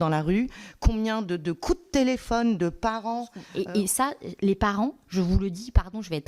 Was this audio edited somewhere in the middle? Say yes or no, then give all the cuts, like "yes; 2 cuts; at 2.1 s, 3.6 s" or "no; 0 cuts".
yes; 1 cut; at 3.4 s